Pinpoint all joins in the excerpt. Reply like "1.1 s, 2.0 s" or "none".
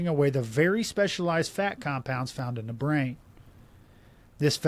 none